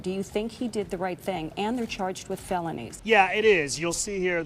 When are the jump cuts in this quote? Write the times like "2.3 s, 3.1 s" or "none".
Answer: 2.9 s